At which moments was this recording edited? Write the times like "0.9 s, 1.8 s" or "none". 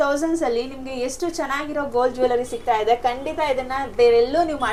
none